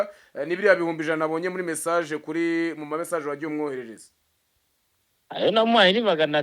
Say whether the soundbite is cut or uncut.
uncut